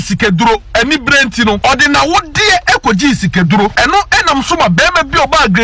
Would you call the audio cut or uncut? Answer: cut